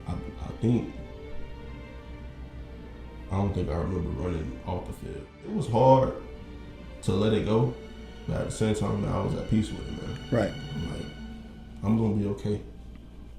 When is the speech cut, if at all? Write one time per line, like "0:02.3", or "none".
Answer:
0:05.6

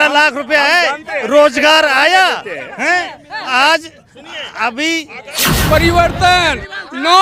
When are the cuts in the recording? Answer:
0:05.4

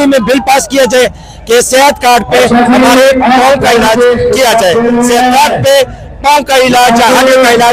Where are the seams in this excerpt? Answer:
none

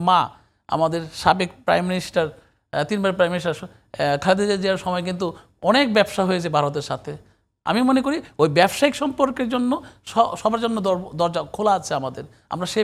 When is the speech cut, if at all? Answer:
none

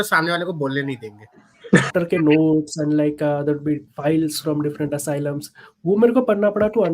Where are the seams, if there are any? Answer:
0:01.9

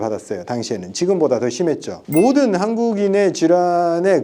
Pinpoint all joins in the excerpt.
0:02.0

